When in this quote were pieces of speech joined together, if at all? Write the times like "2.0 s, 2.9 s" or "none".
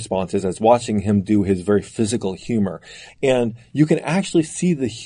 2.9 s